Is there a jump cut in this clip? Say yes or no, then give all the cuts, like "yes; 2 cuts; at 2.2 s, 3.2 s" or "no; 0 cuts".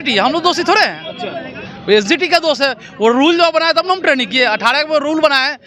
no; 0 cuts